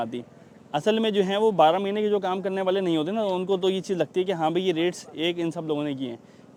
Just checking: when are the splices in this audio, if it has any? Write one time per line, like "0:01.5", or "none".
none